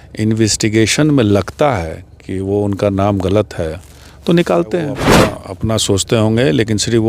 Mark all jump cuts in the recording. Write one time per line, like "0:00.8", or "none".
0:05.1